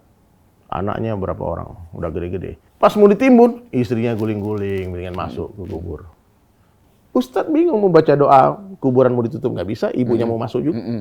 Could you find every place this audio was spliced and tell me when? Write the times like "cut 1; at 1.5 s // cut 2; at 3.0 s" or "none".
cut 1; at 2.6 s // cut 2; at 6.8 s